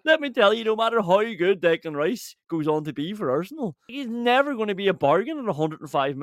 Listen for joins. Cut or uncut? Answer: cut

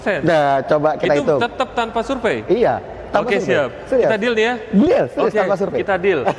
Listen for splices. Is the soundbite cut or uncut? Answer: uncut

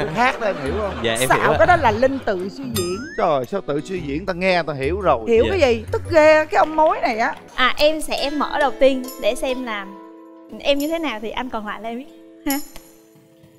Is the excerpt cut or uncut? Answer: cut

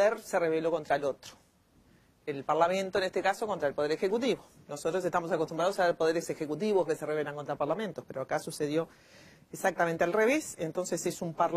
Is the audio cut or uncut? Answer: cut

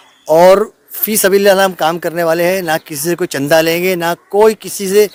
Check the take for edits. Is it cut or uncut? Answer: uncut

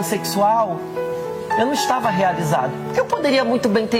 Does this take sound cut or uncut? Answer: uncut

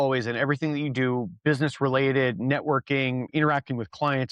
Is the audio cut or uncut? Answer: cut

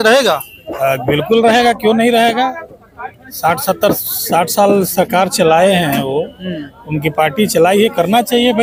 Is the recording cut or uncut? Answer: uncut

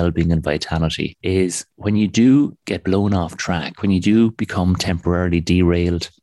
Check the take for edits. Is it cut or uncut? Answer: uncut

